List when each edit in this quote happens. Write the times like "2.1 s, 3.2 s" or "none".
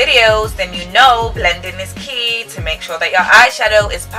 none